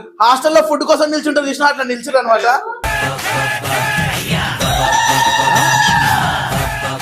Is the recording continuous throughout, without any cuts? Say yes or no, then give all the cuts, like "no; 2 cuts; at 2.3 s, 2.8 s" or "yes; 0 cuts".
yes; 0 cuts